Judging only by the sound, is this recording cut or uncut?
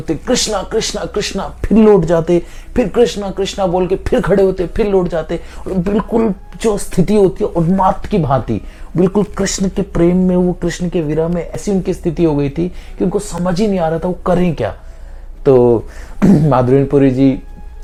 uncut